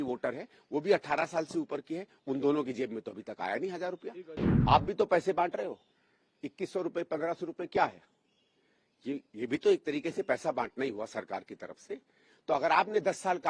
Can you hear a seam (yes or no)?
yes